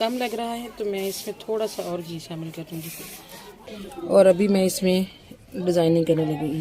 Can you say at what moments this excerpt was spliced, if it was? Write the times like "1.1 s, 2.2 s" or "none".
3.6 s